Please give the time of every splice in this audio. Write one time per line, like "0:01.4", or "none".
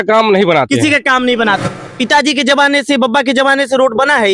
0:01.7